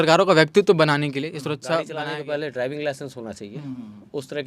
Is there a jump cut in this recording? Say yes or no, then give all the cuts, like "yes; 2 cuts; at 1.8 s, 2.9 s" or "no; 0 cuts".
yes; 1 cut; at 1.9 s